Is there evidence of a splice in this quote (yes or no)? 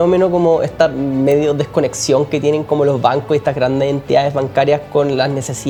no